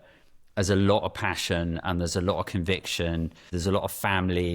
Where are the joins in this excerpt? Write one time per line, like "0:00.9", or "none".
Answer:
0:03.5